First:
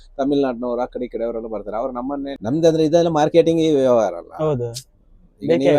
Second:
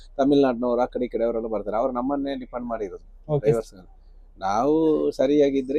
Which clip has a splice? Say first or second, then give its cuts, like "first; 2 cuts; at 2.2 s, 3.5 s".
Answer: first; 1 cut; at 2.3 s